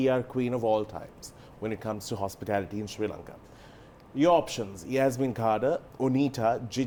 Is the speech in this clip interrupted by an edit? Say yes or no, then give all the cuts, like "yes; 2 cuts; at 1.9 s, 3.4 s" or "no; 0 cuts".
no; 0 cuts